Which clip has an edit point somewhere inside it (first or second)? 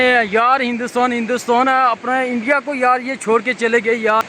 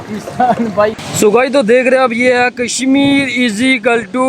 second